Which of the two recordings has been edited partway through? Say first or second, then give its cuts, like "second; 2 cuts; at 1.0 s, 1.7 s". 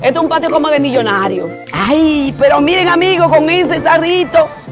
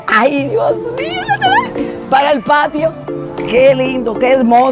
first; 1 cut; at 1.7 s